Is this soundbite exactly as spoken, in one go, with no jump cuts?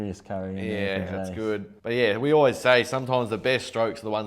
no; 1 cut; at 1.7 s

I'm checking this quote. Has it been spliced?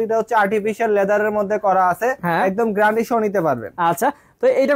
no; 0 cuts

